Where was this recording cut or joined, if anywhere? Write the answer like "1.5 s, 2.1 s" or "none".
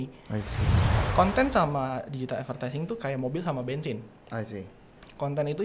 0.9 s

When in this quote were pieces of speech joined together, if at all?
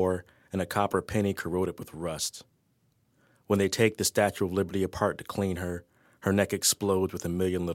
3.4 s

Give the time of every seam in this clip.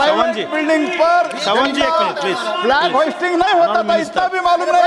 none

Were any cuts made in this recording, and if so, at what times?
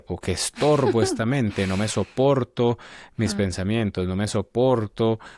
none

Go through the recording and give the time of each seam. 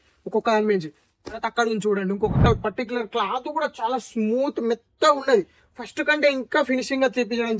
2.5 s

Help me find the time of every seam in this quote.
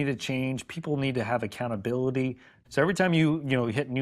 2.5 s

